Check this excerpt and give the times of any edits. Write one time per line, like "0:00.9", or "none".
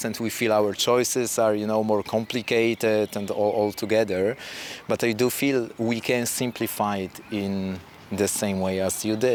none